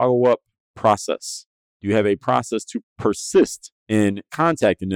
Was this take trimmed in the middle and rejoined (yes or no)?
yes